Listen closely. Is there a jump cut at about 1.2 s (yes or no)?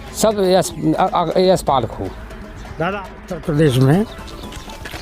no